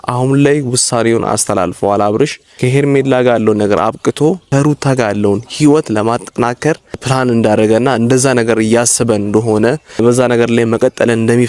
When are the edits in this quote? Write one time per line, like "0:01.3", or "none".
0:02.5
0:04.4
0:07.0
0:10.0